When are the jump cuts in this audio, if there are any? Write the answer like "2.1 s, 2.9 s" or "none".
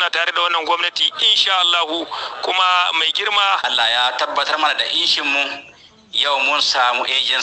3.6 s

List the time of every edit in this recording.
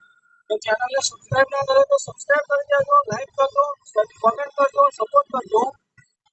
none

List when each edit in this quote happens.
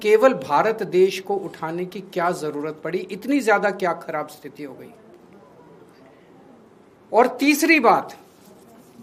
none

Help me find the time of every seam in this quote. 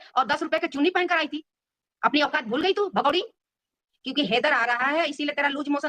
3.9 s

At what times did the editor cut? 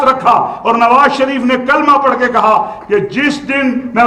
none

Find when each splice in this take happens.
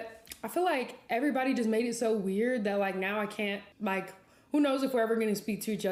none

